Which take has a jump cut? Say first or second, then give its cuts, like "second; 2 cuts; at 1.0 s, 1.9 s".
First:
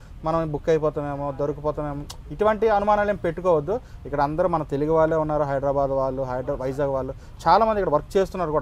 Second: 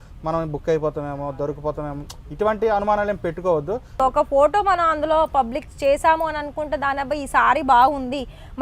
second; 1 cut; at 4.0 s